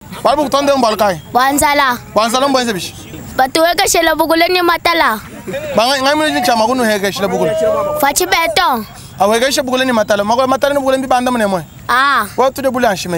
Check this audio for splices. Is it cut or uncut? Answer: uncut